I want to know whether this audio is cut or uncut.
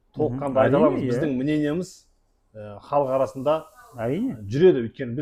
uncut